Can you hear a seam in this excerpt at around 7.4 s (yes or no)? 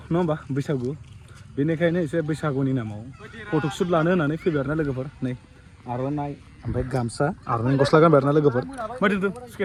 no